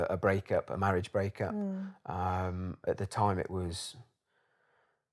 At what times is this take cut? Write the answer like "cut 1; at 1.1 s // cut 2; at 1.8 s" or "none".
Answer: cut 1; at 2.8 s